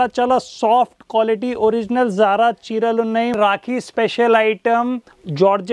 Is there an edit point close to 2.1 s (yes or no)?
no